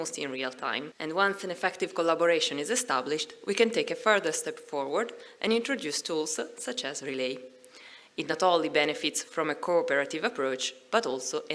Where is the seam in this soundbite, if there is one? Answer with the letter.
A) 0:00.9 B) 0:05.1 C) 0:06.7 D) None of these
A